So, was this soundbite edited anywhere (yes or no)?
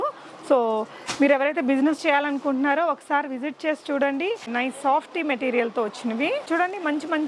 yes